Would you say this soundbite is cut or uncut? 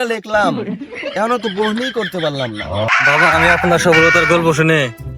cut